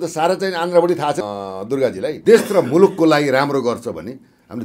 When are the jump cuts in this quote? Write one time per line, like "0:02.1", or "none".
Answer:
0:02.1